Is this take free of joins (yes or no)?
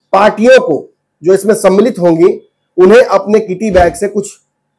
yes